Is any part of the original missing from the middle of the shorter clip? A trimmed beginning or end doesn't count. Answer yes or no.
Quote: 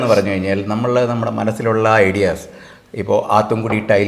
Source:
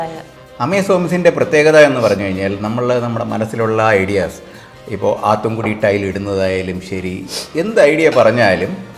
no